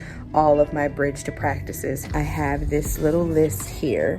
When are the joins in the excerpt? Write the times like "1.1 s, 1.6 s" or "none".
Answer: 2.1 s